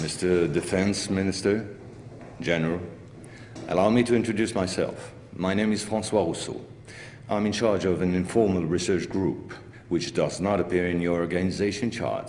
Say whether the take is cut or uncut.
uncut